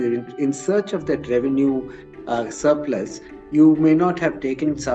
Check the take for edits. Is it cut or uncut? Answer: uncut